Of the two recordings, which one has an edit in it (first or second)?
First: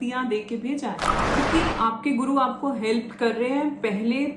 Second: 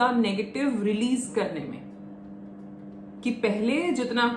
first